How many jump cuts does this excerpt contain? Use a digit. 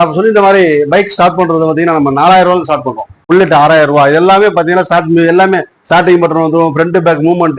1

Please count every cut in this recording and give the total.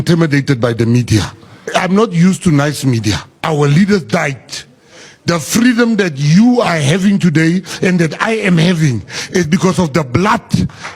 2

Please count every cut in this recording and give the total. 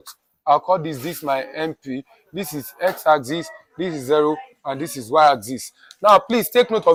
0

